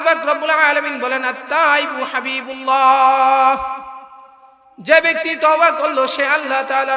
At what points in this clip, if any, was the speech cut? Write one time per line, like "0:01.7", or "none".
none

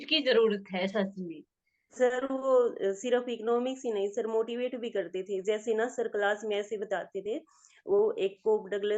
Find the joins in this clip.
0:01.9

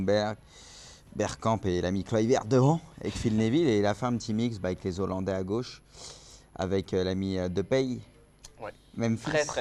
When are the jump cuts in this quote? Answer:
none

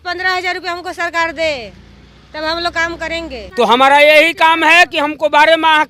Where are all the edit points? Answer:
0:03.4

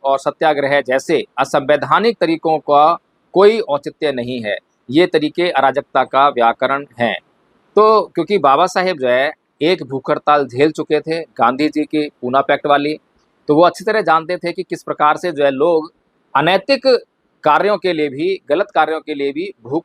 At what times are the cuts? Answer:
none

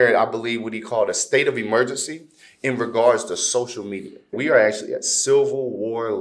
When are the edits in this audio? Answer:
0:04.4

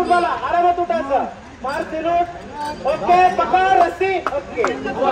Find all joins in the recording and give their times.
none

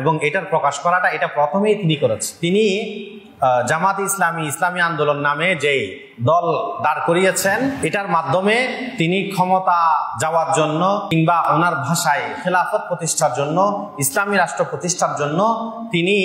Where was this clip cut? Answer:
0:02.3
0:07.8
0:10.1
0:11.4

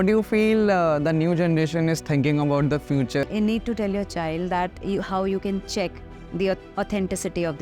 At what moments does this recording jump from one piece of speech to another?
0:03.2

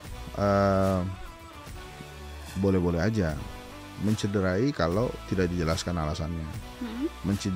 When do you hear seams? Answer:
none

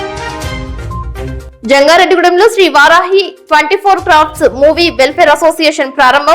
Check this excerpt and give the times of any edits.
0:01.3

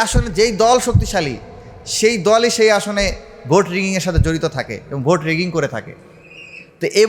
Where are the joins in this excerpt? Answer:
none

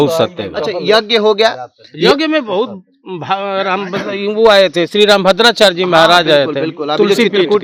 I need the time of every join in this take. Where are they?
none

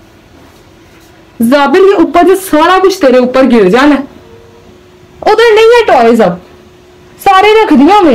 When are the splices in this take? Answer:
none

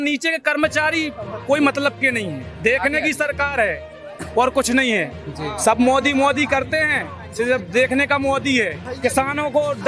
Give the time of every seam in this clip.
0:02.5
0:08.9

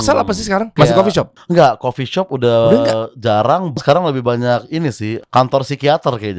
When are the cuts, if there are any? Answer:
0:01.0
0:03.8
0:05.1

